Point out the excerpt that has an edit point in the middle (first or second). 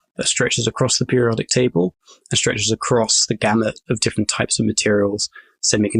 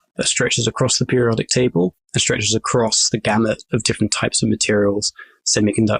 second